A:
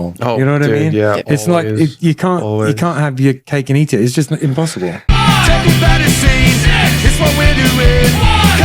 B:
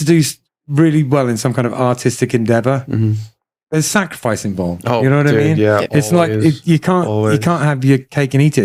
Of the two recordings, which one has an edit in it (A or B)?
A